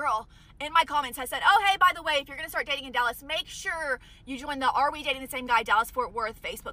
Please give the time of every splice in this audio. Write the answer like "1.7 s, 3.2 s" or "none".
none